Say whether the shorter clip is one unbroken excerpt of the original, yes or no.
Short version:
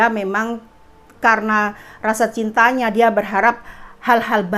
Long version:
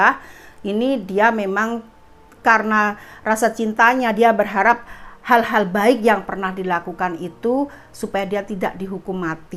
yes